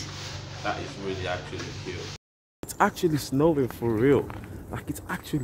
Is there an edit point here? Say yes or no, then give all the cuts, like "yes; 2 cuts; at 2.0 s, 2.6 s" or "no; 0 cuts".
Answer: yes; 1 cut; at 2.6 s